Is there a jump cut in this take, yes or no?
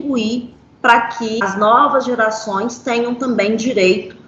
yes